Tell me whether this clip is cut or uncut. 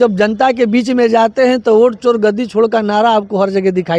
uncut